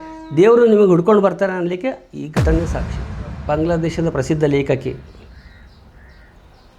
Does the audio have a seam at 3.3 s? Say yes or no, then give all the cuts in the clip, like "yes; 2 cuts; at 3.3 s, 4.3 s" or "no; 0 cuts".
yes; 1 cut; at 3.3 s